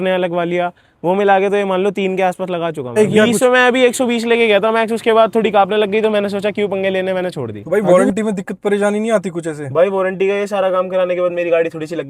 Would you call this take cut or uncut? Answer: cut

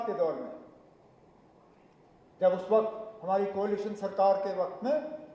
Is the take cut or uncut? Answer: uncut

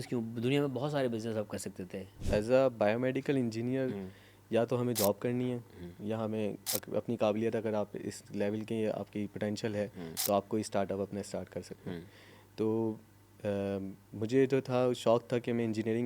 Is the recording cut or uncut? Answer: cut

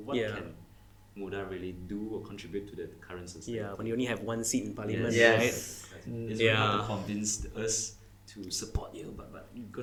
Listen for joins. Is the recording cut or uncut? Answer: uncut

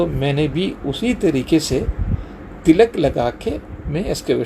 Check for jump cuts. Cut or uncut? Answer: uncut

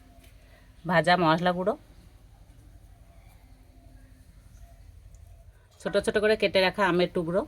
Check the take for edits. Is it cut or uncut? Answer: cut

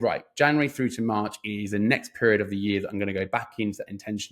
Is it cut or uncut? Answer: uncut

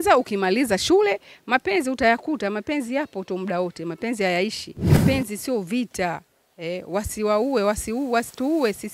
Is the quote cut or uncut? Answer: cut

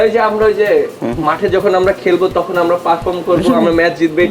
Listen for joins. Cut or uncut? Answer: uncut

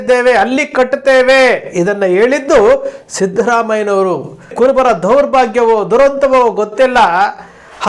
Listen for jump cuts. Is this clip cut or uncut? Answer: cut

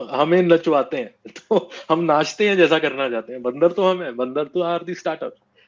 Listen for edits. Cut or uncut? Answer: uncut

